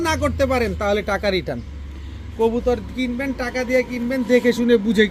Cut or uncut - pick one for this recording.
uncut